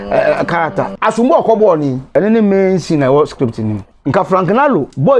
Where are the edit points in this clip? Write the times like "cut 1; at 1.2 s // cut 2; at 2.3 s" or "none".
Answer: cut 1; at 0.9 s // cut 2; at 2.0 s // cut 3; at 3.8 s